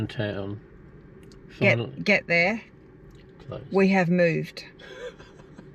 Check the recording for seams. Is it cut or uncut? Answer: uncut